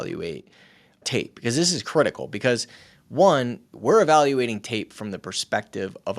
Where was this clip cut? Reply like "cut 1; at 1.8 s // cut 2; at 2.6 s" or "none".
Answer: cut 1; at 1.0 s // cut 2; at 3.6 s